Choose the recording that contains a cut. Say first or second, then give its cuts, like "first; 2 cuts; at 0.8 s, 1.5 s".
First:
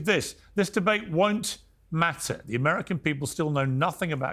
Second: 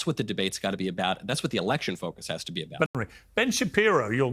second; 1 cut; at 2.9 s